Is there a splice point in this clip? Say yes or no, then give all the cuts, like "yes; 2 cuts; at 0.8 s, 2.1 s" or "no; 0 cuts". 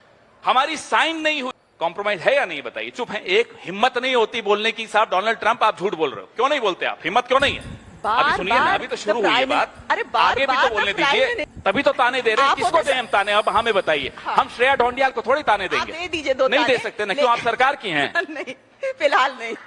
yes; 2 cuts; at 1.6 s, 11.5 s